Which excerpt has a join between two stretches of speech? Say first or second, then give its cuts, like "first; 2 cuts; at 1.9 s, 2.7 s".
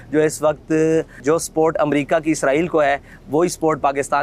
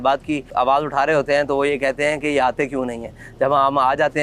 first; 1 cut; at 1.1 s